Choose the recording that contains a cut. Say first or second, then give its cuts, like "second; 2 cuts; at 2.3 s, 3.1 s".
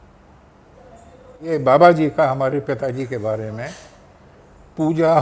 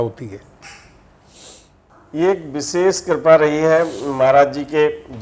second; 1 cut; at 1.9 s